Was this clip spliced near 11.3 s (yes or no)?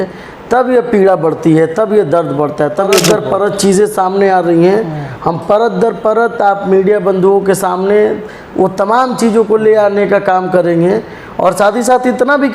no